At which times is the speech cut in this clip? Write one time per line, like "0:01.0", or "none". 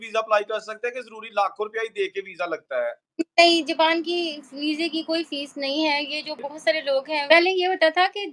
0:07.2